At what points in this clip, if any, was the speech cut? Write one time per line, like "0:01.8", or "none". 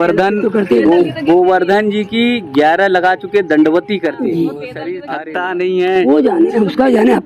0:05.0

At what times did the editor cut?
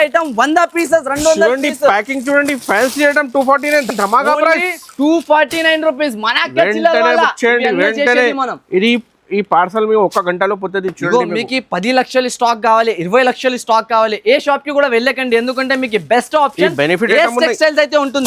none

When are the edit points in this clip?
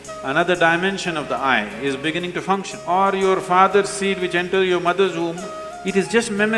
0:02.7

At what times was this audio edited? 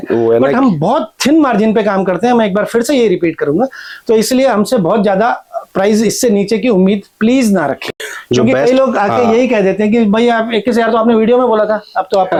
none

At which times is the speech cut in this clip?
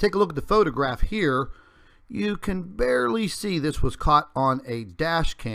0:04.2

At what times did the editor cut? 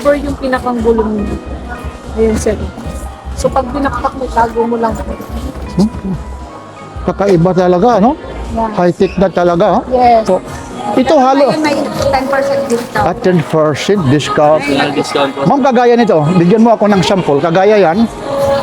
0:10.3

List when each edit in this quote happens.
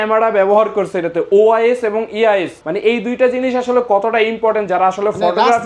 0:02.6

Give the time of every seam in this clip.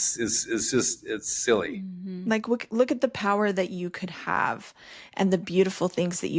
none

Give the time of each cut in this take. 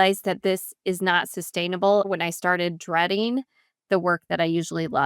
0:02.1

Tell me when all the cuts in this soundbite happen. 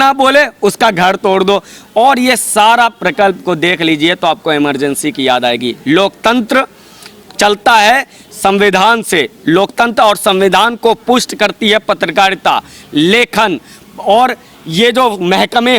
0:01.8

